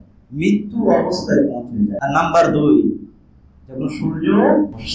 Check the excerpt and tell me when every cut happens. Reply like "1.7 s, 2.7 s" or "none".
2.0 s